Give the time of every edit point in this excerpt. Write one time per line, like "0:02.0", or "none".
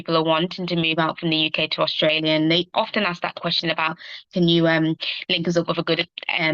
none